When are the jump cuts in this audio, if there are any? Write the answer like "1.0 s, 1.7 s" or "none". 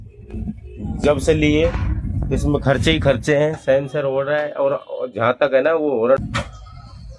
6.2 s